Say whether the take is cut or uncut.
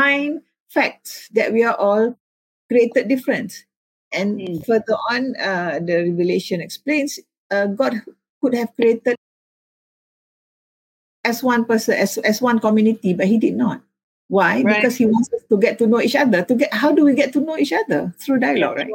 uncut